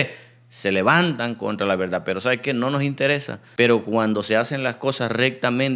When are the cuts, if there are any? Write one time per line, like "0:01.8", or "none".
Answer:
0:03.4